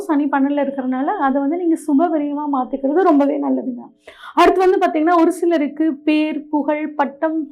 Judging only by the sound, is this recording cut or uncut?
uncut